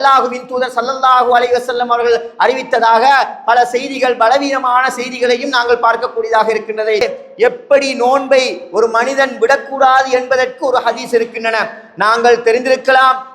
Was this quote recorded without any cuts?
no; 1 cut; at 7.0 s

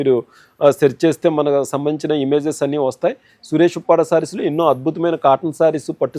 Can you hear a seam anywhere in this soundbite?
no; 0 cuts

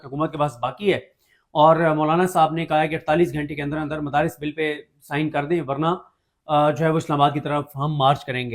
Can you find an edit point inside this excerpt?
no; 0 cuts

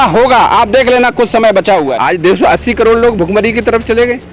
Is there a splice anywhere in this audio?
yes; 1 cut; at 1.9 s

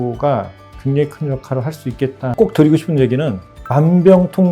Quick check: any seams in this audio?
yes; 1 cut; at 2.3 s

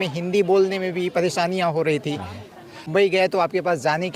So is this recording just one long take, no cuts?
no; 1 cut; at 2.8 s

